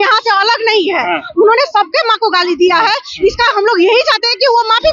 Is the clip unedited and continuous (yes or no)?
yes